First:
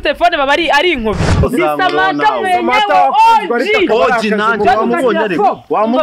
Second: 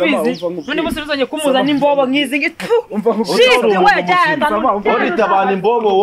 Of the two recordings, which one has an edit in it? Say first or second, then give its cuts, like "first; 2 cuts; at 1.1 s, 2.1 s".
first; 1 cut; at 1.4 s